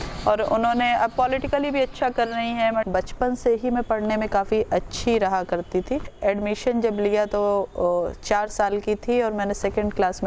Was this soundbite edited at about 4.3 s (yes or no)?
no